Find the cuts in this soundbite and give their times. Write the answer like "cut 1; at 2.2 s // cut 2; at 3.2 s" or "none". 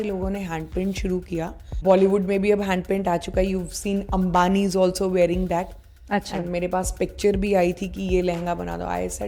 cut 1; at 1.7 s